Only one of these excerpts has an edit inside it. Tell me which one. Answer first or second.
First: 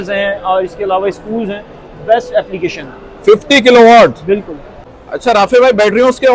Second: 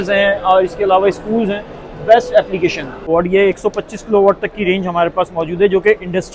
second